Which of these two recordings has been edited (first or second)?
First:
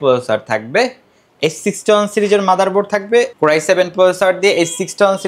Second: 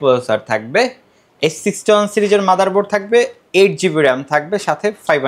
first